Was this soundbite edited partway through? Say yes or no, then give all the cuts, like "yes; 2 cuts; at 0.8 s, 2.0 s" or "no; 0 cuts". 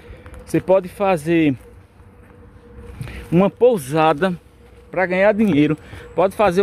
no; 0 cuts